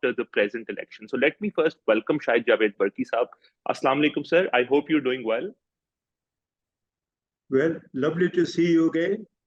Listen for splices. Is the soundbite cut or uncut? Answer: uncut